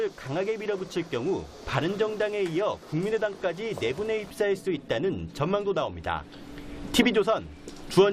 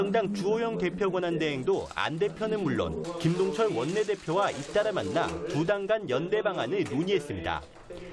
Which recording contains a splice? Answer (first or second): second